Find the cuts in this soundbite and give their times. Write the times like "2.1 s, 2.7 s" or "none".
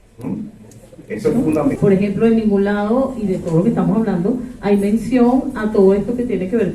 1.8 s